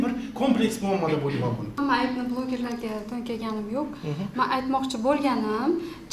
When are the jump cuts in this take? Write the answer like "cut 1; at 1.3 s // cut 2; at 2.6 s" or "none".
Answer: cut 1; at 1.7 s

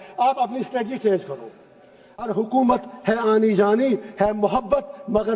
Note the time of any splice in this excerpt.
cut 1; at 2.2 s

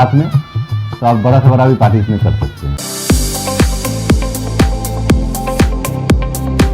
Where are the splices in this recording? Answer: cut 1; at 2.7 s

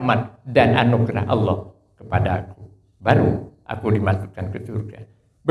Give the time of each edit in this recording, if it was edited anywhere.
none

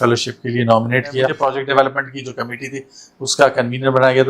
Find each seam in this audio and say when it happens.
cut 1; at 1.3 s

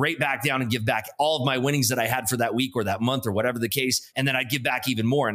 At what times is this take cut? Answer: cut 1; at 4.1 s

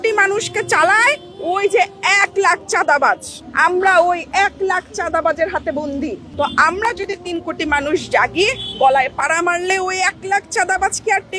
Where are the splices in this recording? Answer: none

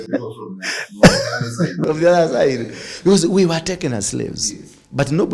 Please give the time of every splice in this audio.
none

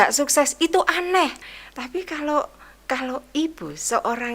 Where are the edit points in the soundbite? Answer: cut 1; at 1.5 s

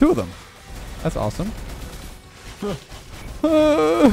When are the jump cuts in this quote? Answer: cut 1; at 3.2 s

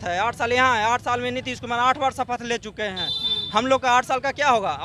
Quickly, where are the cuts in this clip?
none

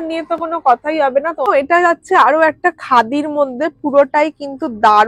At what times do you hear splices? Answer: cut 1; at 1.5 s

